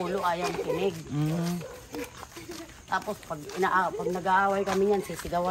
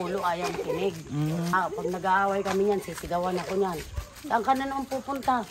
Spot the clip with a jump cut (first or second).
second